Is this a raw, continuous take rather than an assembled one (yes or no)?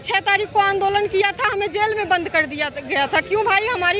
yes